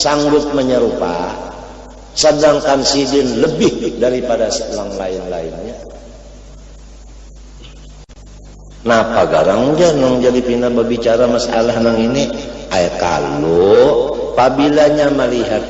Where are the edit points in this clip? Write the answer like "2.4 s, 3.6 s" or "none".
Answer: 8.1 s